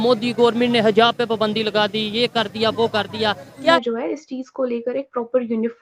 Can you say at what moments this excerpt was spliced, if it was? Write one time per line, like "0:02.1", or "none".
0:03.8